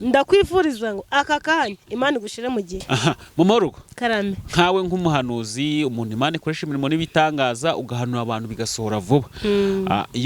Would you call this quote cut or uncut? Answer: cut